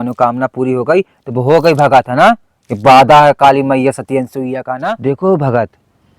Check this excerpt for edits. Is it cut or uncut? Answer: cut